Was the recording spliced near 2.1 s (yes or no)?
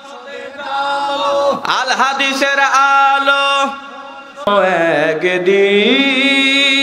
no